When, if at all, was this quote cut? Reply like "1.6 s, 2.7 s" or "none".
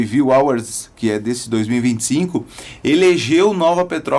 none